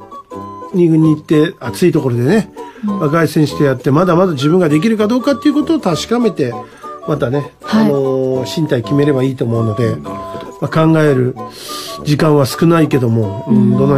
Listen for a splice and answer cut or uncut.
uncut